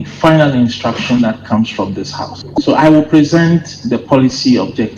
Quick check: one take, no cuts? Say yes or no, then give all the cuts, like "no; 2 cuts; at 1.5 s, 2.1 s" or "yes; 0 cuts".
yes; 0 cuts